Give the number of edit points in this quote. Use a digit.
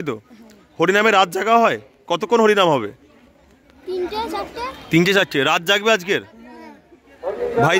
0